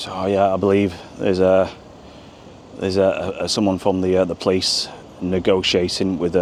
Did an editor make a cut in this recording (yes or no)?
no